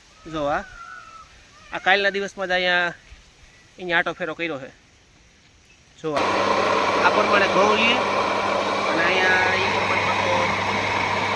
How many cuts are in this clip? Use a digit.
1